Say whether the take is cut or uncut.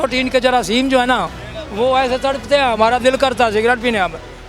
uncut